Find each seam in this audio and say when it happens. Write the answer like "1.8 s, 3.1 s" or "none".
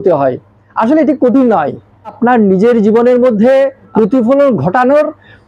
2.2 s, 3.9 s